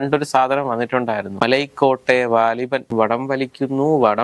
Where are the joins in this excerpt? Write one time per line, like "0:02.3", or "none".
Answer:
0:01.4
0:02.9